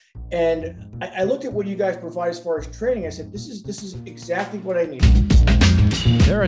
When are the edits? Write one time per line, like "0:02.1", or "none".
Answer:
0:05.0